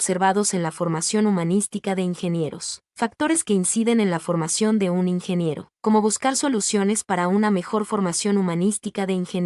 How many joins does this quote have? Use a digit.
2